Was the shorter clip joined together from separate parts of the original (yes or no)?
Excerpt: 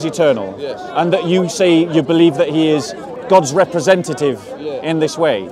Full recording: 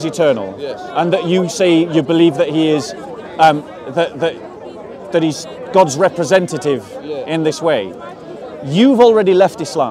yes